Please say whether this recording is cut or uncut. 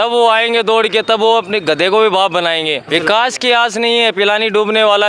cut